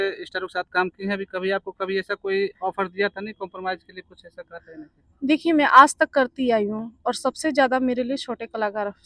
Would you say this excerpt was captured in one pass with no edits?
yes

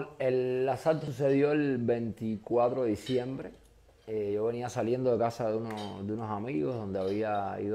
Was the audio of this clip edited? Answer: yes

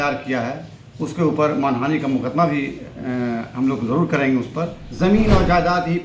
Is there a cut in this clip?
yes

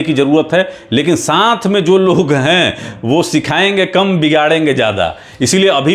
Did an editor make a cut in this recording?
no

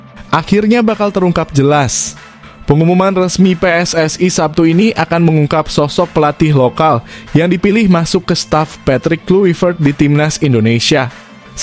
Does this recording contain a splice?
no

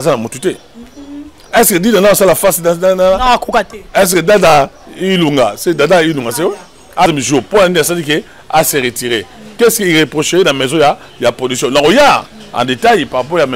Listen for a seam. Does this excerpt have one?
yes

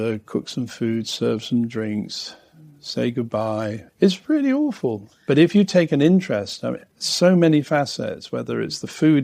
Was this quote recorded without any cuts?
no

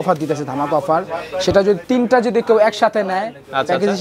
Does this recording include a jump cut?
no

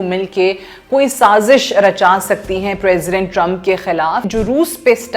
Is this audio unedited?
no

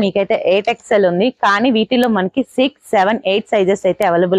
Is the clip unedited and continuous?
yes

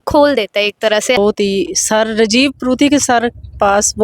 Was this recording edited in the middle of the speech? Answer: yes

